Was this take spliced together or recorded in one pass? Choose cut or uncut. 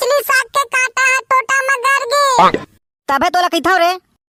uncut